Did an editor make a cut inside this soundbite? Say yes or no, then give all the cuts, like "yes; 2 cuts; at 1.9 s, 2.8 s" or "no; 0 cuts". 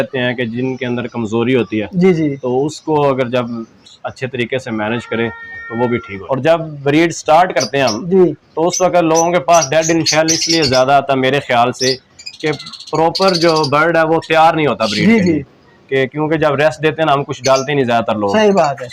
yes; 1 cut; at 6.1 s